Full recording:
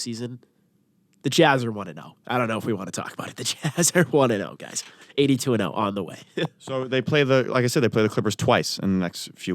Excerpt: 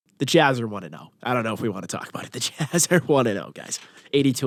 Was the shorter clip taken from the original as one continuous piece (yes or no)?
yes